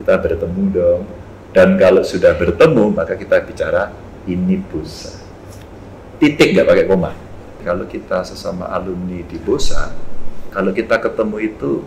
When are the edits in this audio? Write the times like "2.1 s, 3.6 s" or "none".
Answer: 7.6 s